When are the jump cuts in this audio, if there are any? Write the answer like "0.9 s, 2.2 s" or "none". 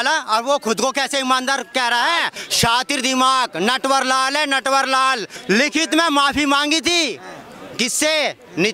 2.4 s, 5.3 s